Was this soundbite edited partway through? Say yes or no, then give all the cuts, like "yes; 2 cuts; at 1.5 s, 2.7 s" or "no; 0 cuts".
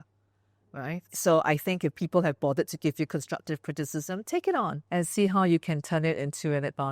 yes; 2 cuts; at 1.1 s, 4.8 s